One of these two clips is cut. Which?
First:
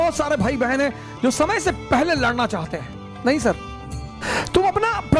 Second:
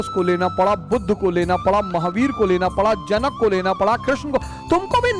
first; 1 cut; at 4.3 s

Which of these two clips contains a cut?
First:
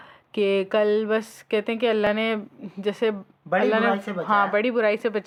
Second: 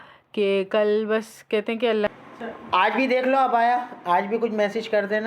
second; 1 cut; at 2.1 s

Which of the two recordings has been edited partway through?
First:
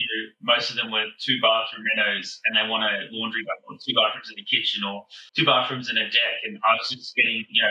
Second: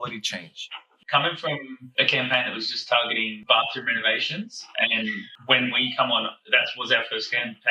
second; 3 cuts; at 0.9 s, 1.8 s, 3.3 s

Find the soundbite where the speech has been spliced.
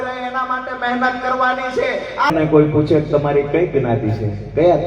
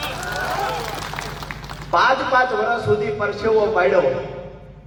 first; 1 cut; at 2.3 s

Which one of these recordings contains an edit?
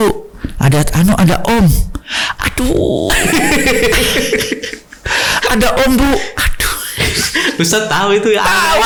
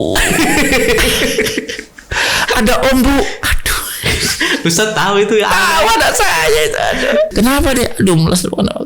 second; 1 cut; at 7.3 s

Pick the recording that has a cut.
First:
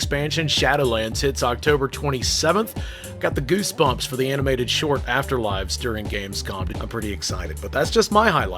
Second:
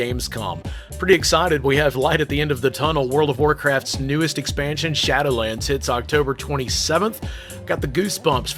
first; 1 cut; at 6.7 s

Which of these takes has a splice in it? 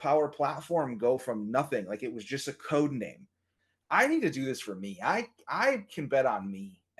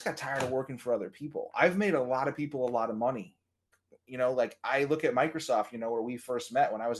first; 1 cut; at 3.6 s

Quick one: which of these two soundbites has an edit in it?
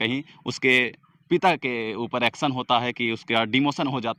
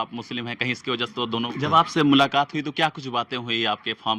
second; 1 cut; at 1.5 s

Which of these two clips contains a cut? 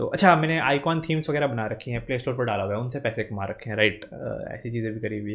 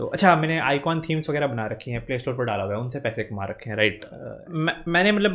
second; 1 cut; at 4.3 s

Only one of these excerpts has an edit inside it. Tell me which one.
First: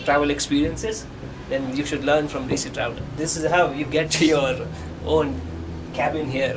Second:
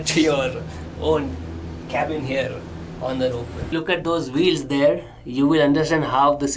second; 1 cut; at 3.6 s

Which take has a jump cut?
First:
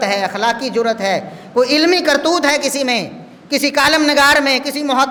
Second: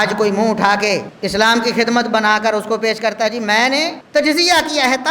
second; 2 cuts; at 1.1 s, 4.0 s

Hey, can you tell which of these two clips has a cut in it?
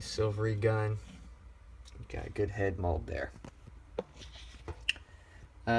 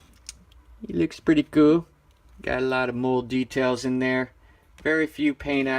second; 1 cut; at 1.3 s

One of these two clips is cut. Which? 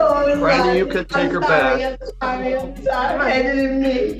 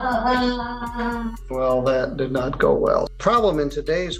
second; 2 cuts; at 1.4 s, 3.1 s

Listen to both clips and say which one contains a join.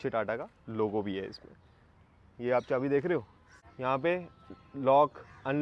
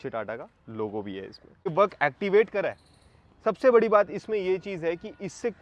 second; 1 cut; at 1.7 s

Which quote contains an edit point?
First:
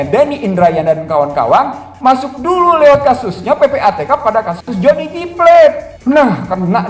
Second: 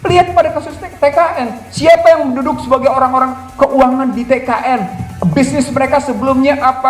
first; 1 cut; at 5.9 s

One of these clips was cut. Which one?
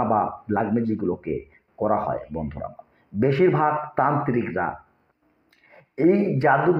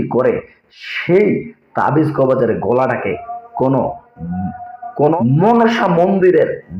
second; 1 cut; at 5.2 s

